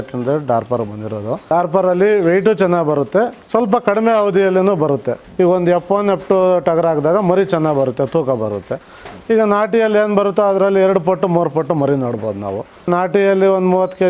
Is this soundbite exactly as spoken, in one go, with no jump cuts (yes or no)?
no